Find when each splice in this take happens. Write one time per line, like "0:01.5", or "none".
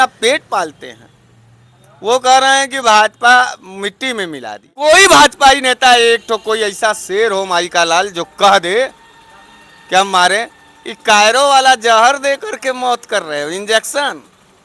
0:04.8